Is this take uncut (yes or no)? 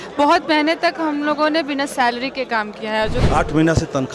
no